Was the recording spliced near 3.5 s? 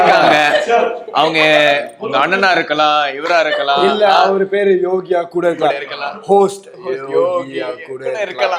no; 0 cuts

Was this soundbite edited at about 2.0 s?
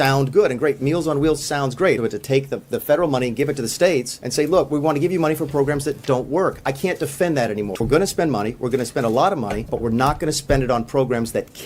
yes; 4 cuts; at 2.0 s, 4.2 s, 7.8 s, 9.6 s

